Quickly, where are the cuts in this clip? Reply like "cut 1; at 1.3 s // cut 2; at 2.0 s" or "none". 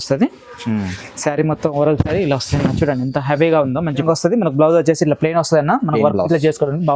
cut 1; at 4.0 s